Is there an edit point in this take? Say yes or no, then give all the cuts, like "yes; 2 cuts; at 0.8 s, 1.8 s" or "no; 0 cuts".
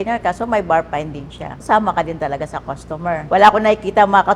yes; 2 cuts; at 1.6 s, 3.2 s